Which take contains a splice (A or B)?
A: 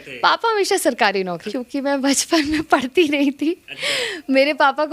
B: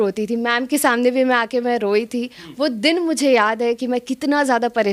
A